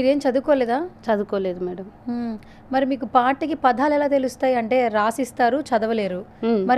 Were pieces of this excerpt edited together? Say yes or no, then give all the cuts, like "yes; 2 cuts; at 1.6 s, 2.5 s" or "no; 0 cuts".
no; 0 cuts